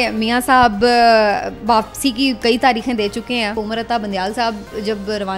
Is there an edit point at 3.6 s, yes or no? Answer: yes